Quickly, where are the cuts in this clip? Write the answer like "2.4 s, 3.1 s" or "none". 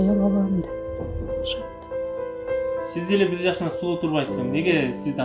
none